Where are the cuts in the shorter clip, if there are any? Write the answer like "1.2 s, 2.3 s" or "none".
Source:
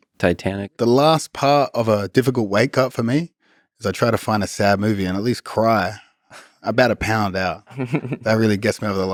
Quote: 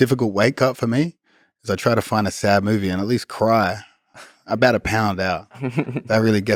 none